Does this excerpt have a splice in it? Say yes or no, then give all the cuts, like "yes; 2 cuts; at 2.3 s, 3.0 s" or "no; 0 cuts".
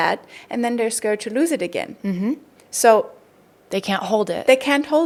no; 0 cuts